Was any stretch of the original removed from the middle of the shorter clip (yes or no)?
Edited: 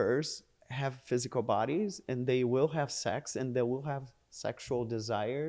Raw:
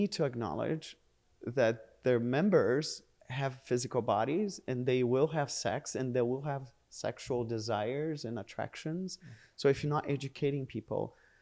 no